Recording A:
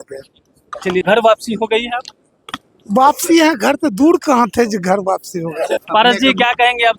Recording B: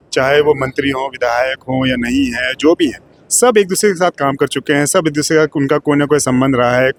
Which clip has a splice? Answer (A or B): A